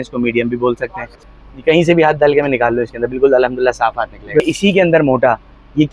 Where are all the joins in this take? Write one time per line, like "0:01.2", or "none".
0:01.1
0:04.4